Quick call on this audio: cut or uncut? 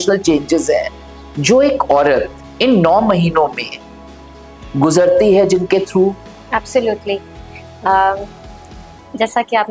uncut